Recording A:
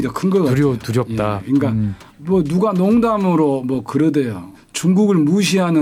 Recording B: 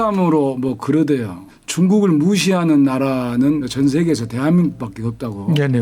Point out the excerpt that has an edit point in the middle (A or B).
B